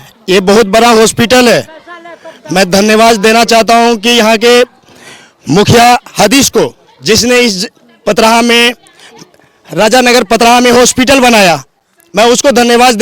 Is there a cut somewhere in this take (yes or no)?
no